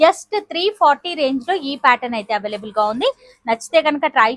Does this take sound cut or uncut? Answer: uncut